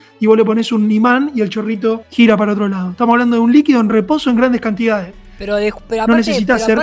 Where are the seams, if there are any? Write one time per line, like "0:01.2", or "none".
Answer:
0:02.0